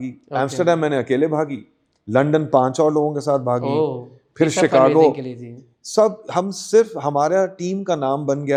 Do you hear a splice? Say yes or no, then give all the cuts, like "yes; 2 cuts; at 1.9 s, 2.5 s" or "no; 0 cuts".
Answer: no; 0 cuts